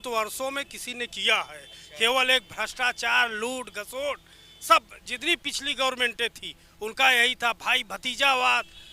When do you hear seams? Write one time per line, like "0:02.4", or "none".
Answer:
none